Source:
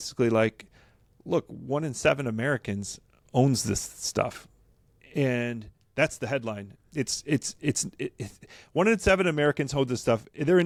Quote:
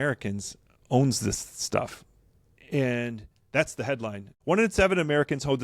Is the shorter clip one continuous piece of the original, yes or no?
no